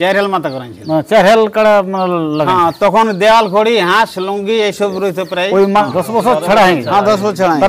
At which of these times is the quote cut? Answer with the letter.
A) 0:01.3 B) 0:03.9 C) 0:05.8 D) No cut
C